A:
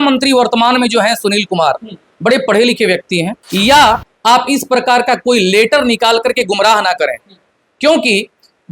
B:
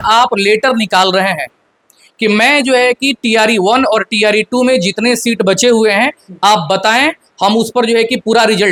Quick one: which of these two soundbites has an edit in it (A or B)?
A